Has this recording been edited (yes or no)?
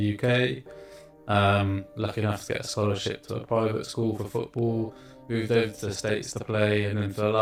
no